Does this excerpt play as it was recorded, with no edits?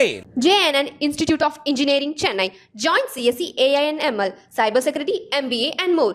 yes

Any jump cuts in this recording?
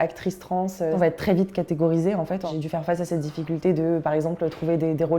yes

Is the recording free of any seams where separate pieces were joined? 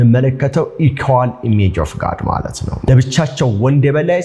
no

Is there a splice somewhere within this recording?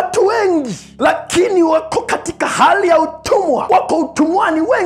no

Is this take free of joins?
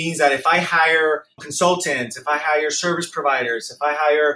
no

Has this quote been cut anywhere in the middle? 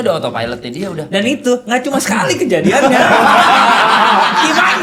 no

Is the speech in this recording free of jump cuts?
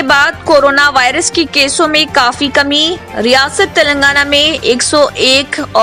yes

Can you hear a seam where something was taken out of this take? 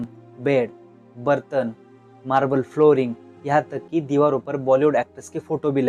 no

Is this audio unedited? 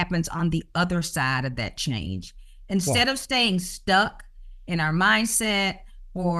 yes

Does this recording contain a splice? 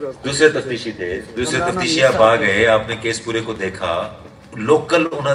no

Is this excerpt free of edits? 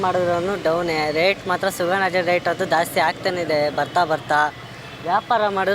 yes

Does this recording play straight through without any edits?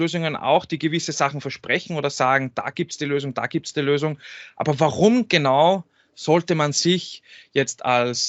yes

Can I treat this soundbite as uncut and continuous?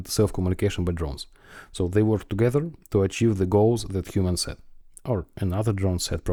yes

